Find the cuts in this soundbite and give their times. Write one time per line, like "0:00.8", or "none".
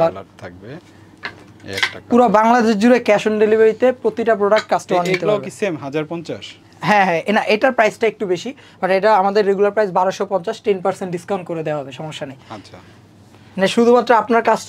none

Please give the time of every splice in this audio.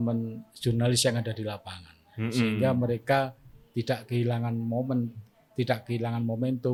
none

